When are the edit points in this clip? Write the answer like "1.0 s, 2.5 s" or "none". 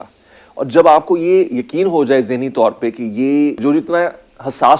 3.6 s